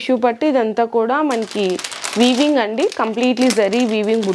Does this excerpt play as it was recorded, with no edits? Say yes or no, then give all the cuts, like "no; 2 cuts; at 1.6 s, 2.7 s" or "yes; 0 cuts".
yes; 0 cuts